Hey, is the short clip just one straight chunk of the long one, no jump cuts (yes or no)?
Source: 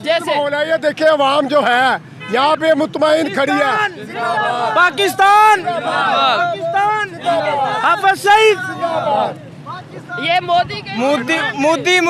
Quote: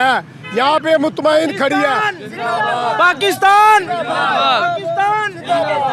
yes